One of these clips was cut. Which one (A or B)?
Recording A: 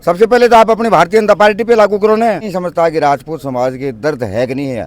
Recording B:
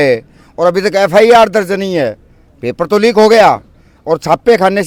A